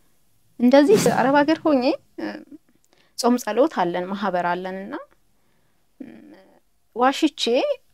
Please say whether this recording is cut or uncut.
cut